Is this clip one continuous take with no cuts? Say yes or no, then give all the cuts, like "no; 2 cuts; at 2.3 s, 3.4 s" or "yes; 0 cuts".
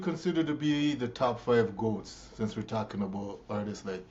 yes; 0 cuts